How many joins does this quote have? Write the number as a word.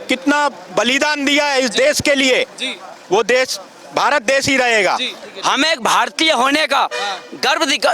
one